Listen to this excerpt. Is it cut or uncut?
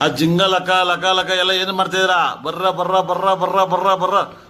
uncut